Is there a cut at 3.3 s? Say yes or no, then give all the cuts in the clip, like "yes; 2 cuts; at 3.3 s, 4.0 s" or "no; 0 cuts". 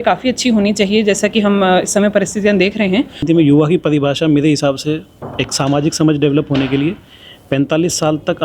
yes; 1 cut; at 3.3 s